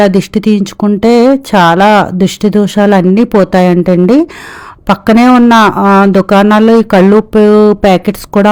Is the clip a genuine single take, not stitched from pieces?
yes; 0 cuts

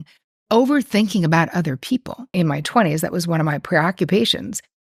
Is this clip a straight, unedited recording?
yes; 0 cuts

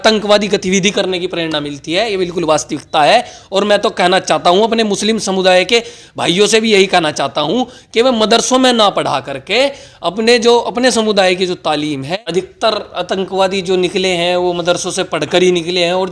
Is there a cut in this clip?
yes; 1 cut; at 12.1 s

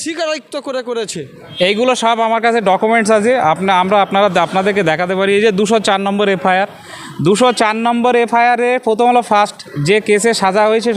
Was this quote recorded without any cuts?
no; 1 cut; at 1.4 s

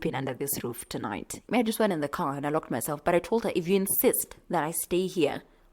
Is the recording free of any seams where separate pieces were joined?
no; 1 cut; at 1.4 s

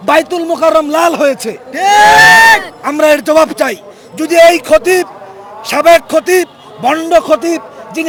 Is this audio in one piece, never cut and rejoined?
yes; 0 cuts

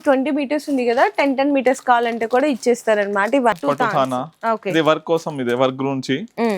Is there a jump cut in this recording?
yes; 1 cut; at 3.6 s

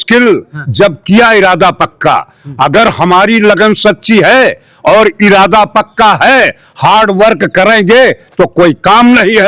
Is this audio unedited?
yes; 0 cuts

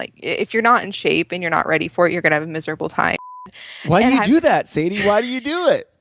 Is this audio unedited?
no; 1 cut; at 3.4 s

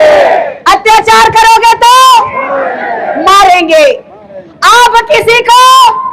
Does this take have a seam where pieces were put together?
no; 0 cuts

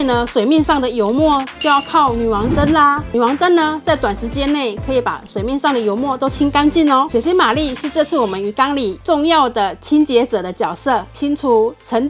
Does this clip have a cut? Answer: yes; 4 cuts; at 3.0 s, 7.1 s, 9.0 s, 11.2 s

